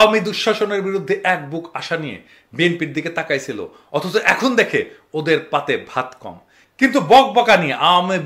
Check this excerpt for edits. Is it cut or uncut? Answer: uncut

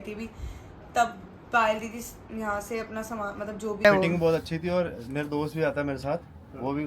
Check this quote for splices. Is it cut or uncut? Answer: cut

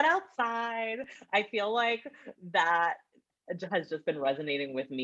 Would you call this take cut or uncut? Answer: uncut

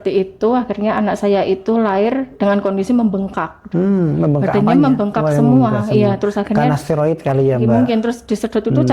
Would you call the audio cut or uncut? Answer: uncut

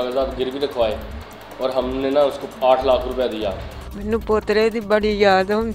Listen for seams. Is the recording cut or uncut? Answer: cut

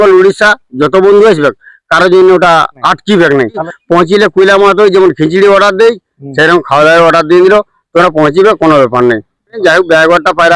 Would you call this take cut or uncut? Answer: cut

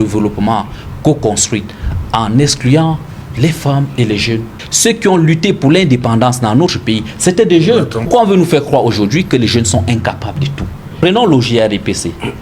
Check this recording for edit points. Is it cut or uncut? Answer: cut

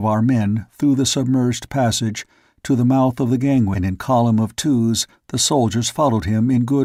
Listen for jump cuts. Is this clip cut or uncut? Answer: uncut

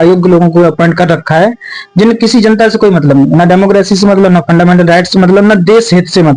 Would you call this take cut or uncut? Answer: uncut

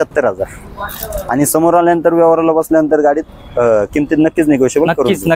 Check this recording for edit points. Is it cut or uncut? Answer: uncut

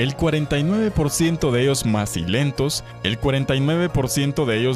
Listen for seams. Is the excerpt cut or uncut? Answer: cut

